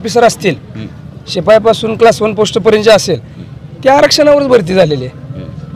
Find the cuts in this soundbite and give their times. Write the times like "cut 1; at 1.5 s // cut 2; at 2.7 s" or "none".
none